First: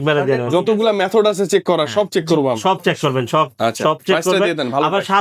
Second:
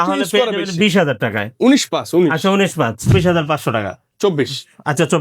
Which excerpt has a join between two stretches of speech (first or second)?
second